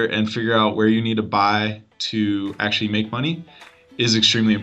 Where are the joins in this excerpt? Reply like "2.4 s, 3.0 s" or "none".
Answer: none

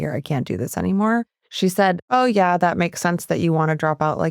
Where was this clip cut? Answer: 1.9 s

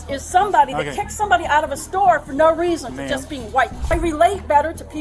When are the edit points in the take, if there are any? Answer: 3.9 s

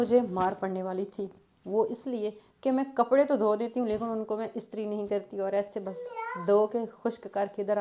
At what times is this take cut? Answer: none

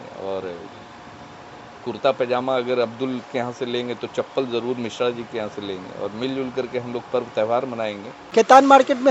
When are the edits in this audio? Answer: 8.2 s

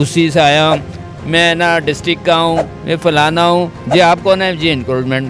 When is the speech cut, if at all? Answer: 3.8 s

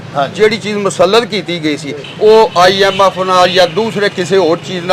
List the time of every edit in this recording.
2.0 s

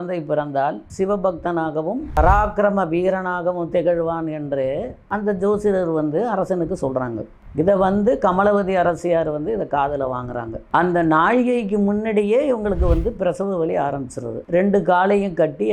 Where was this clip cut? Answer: 10.6 s, 14.4 s

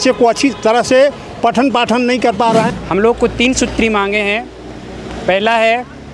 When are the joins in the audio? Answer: 2.7 s

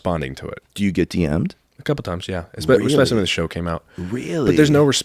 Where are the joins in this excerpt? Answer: none

